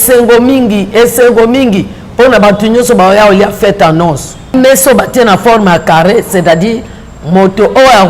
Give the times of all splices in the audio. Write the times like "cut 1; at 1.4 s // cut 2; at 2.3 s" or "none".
cut 1; at 4.5 s